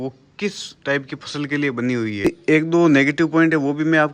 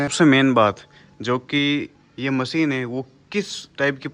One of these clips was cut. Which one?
first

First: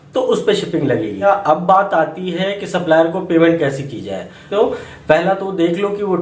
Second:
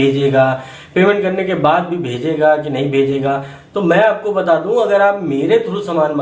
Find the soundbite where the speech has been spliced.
first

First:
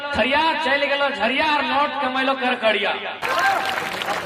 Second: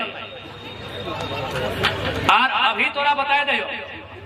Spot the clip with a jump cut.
first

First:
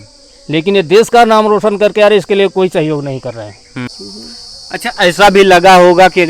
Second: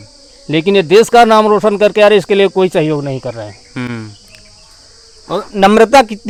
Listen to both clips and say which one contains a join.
first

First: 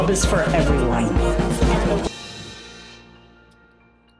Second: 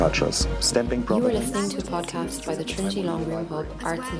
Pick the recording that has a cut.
first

